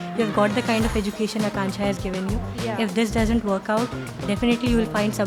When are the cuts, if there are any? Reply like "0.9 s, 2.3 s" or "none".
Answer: none